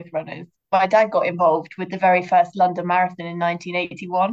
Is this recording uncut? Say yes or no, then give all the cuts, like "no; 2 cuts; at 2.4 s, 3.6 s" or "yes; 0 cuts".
yes; 0 cuts